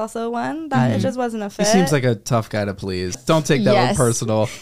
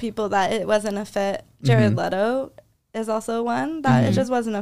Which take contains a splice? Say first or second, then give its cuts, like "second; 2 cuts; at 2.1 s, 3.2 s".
first; 1 cut; at 3.2 s